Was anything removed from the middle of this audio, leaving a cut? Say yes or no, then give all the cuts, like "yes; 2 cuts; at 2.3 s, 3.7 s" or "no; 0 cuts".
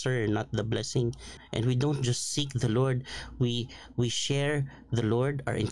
yes; 1 cut; at 1.4 s